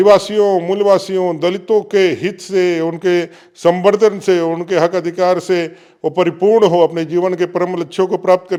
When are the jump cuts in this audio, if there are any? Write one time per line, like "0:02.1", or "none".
none